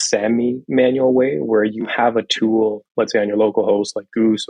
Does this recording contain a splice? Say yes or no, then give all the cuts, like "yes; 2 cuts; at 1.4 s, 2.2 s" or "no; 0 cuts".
no; 0 cuts